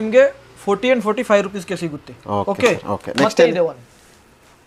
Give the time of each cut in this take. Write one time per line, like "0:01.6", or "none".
none